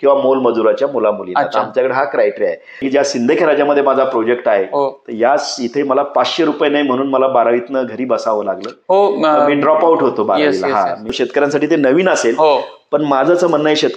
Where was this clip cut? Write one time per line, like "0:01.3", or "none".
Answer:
0:02.8
0:11.1